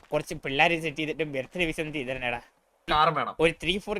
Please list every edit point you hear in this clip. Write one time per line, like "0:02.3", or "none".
0:02.8